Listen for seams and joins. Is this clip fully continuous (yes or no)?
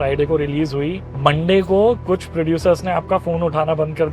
no